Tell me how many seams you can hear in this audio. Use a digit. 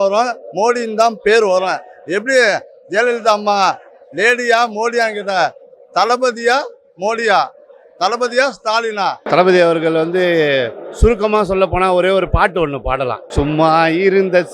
2